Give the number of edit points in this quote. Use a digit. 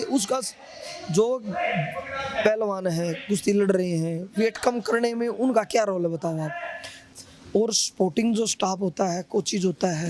1